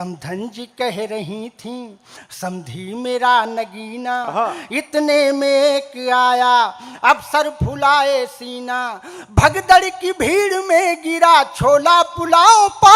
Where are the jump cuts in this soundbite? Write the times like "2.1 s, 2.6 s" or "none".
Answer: none